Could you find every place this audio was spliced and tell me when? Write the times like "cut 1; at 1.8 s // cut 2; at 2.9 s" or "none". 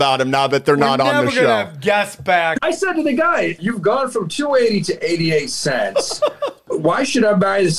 cut 1; at 2.5 s // cut 2; at 3.6 s // cut 3; at 6.7 s